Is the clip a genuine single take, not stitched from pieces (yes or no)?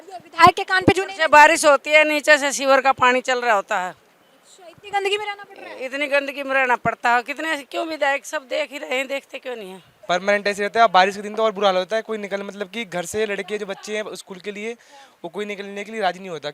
no